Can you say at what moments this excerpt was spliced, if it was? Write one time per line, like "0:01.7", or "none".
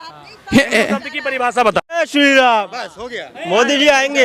0:02.0